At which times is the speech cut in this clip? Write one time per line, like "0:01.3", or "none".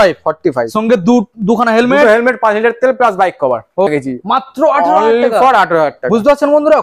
0:03.9

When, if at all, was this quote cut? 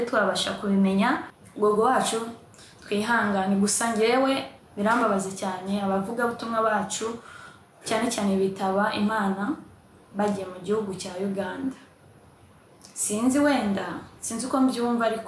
0:01.4
0:04.6

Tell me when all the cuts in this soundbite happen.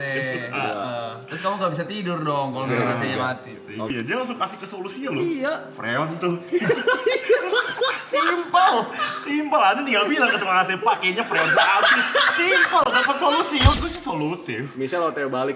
0:03.9
0:13.8

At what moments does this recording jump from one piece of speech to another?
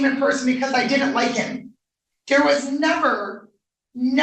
none

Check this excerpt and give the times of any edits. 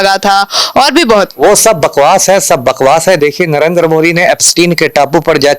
none

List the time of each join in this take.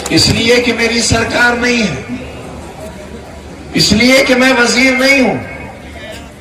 none

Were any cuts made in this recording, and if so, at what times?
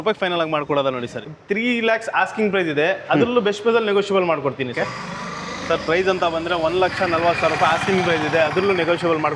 0:01.2
0:04.8

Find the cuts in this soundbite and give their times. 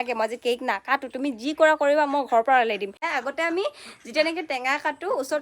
0:03.1

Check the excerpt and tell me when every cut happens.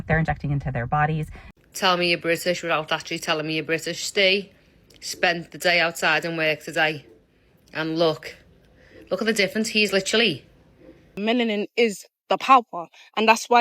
0:01.5
0:11.1

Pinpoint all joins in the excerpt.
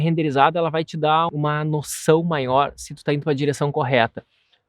0:01.3

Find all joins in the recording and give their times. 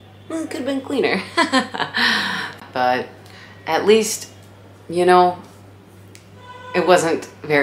none

